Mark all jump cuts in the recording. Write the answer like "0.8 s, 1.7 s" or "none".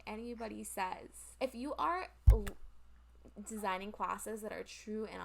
1.2 s